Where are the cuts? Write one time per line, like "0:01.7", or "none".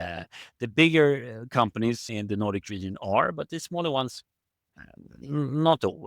0:02.1